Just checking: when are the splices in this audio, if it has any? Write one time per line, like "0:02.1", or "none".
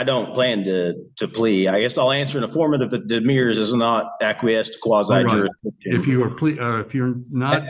none